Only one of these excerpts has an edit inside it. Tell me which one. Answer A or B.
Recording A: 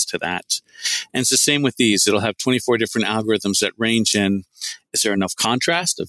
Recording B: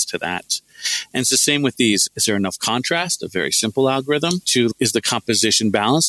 B